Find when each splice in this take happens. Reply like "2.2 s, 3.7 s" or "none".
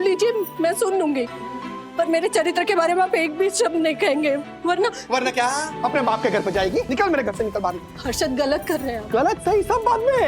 5.7 s, 6.9 s